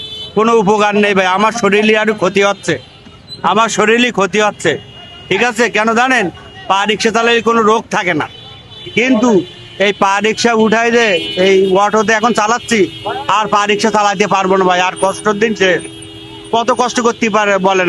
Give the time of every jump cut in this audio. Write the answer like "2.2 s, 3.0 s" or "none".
none